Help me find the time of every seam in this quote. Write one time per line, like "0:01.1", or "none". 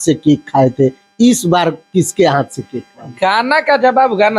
0:03.1